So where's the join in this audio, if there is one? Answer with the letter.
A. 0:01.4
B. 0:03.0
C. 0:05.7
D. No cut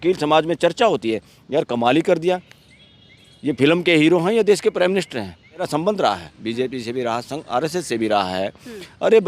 C